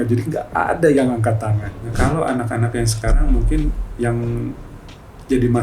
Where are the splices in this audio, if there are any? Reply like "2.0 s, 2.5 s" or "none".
1.9 s